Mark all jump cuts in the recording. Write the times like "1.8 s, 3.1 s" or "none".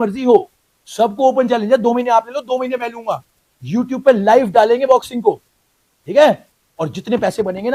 none